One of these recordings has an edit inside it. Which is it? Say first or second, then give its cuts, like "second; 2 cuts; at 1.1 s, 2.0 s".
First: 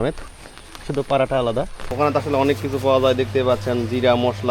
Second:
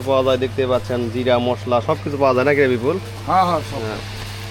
first; 1 cut; at 1.8 s